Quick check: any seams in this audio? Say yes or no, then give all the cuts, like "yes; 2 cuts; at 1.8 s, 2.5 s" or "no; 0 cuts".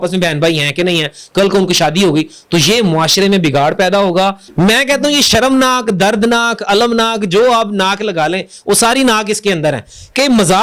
yes; 1 cut; at 4.4 s